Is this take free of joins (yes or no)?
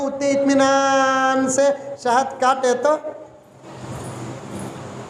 yes